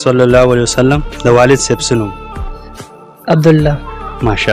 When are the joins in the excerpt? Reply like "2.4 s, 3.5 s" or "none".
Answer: none